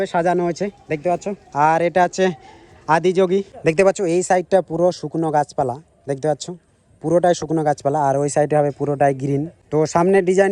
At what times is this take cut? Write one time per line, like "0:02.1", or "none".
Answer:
0:03.5
0:09.6